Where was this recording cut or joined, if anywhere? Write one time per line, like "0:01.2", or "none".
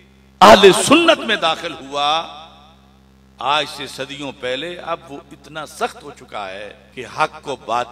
0:06.8